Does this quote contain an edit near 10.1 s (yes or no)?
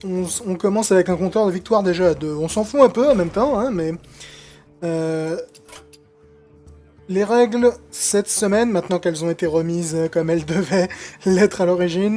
yes